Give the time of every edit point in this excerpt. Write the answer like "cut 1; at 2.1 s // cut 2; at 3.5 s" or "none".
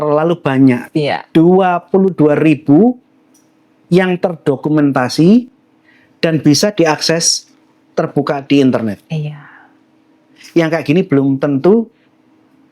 none